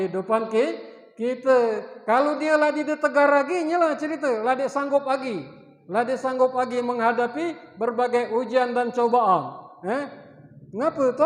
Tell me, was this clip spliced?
no; 0 cuts

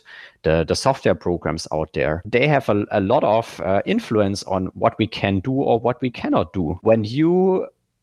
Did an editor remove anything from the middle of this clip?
yes; 2 cuts; at 2.2 s, 6.8 s

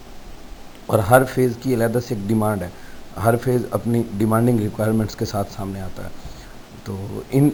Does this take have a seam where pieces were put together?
no; 0 cuts

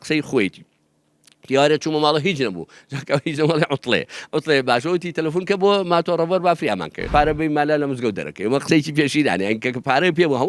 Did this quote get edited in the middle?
yes; 1 cut; at 7.1 s

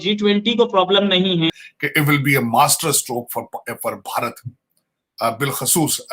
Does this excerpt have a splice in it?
yes; 1 cut; at 1.6 s

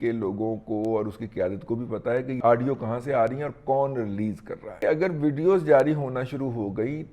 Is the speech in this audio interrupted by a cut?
yes; 2 cuts; at 2.4 s, 4.8 s

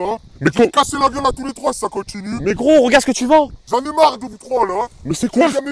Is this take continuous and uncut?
yes; 0 cuts

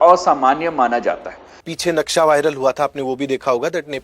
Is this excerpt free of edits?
no; 1 cut; at 1.6 s

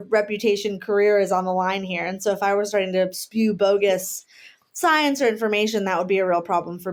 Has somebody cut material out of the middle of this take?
no; 0 cuts

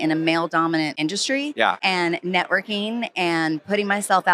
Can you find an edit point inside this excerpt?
yes; 2 cuts; at 0.9 s, 1.8 s

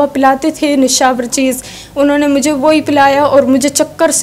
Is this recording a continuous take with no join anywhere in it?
yes; 0 cuts

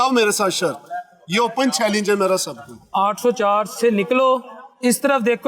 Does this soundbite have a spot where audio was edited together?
yes; 1 cut; at 2.8 s

